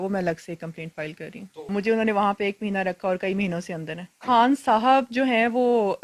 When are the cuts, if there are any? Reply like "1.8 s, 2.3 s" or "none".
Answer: 1.7 s, 4.2 s